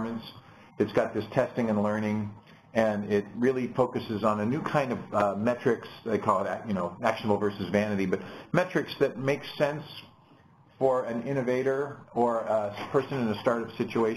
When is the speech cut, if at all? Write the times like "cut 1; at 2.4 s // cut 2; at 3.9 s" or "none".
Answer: cut 1; at 1.8 s